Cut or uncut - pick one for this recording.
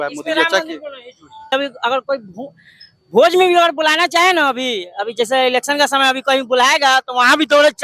cut